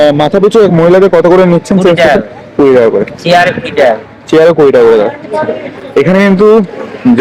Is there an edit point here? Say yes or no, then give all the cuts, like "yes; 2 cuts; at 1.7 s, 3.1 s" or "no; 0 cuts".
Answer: no; 0 cuts